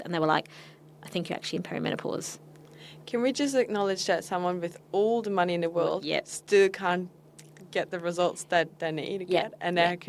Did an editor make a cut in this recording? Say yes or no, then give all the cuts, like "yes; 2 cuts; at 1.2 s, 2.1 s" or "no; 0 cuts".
no; 0 cuts